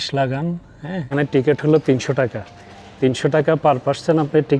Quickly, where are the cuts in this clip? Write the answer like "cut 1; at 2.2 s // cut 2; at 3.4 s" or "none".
cut 1; at 1.1 s